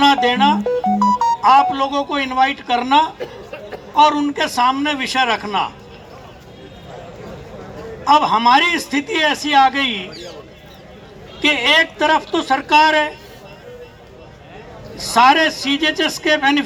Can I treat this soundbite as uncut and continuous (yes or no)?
yes